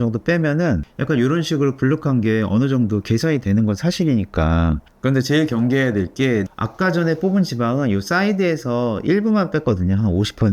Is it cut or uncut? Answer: cut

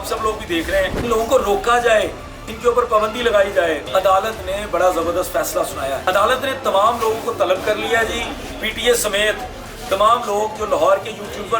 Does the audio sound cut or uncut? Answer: cut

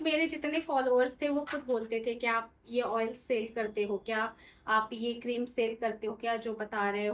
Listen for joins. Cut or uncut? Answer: uncut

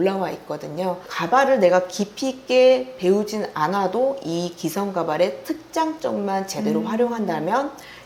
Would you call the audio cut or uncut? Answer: uncut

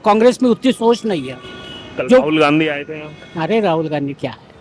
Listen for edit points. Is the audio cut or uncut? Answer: uncut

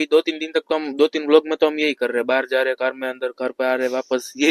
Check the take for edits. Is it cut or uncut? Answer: uncut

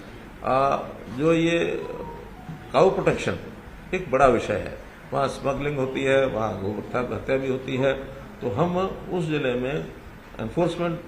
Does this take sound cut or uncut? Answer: uncut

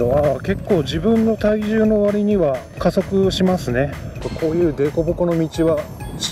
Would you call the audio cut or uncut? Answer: cut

